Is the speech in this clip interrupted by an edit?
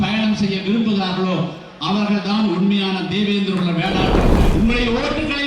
yes; 1 cut; at 4.4 s

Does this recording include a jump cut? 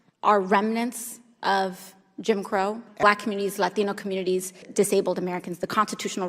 yes; 2 cuts; at 3.0 s, 4.7 s

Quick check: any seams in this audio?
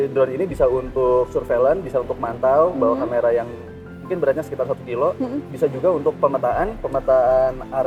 no; 0 cuts

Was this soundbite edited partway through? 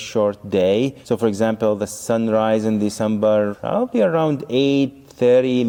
no; 0 cuts

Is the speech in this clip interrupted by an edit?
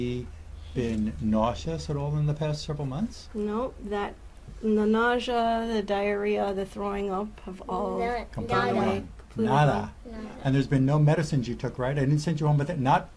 no; 0 cuts

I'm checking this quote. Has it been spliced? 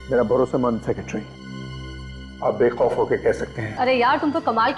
yes; 1 cut; at 3.6 s

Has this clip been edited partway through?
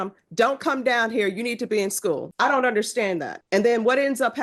yes; 2 cuts; at 2.3 s, 3.4 s

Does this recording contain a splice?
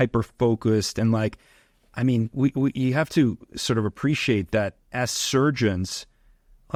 no; 0 cuts

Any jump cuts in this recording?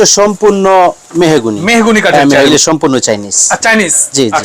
yes; 1 cut; at 2.5 s

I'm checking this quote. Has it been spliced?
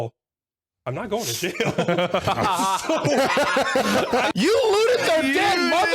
yes; 1 cut; at 4.3 s

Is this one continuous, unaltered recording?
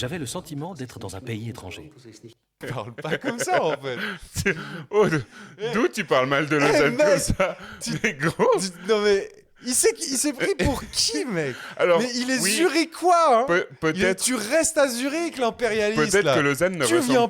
no; 1 cut; at 2.6 s

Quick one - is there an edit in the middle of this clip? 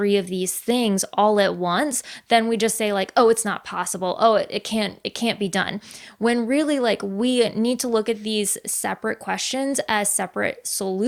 no; 0 cuts

